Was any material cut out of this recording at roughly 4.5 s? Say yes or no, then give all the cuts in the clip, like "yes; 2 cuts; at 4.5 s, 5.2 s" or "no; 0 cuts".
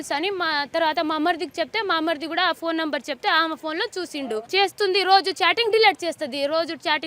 yes; 1 cut; at 4.5 s